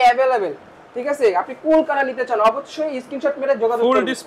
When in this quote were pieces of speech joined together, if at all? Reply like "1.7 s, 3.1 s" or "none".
none